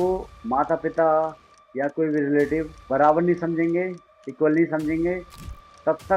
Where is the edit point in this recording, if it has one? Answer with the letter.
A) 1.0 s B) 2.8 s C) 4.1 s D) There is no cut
B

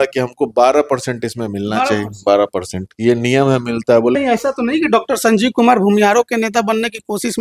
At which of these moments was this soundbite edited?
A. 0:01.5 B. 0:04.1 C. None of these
B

